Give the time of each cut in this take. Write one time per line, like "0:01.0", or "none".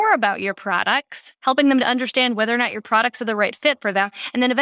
none